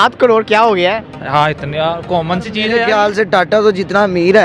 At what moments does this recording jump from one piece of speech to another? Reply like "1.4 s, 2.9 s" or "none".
2.8 s